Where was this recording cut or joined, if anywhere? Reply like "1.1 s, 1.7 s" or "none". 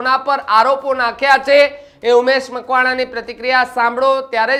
none

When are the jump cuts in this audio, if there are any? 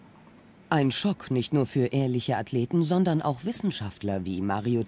3.3 s

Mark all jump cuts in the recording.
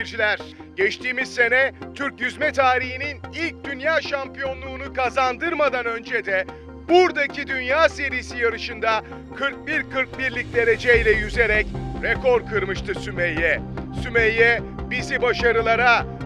none

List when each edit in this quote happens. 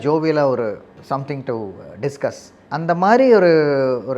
0.9 s, 2.5 s

